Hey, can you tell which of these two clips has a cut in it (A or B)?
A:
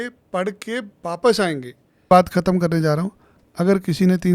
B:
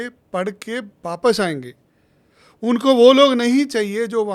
A